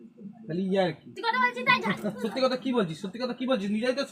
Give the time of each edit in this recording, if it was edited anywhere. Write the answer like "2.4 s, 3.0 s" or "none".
1.1 s